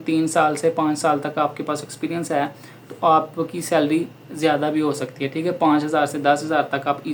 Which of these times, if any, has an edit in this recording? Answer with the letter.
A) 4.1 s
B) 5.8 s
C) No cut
C